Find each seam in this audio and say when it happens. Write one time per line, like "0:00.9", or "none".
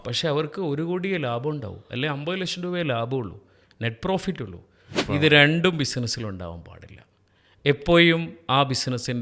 0:05.0